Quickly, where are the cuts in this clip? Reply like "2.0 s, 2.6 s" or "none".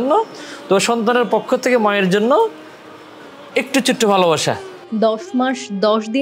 4.8 s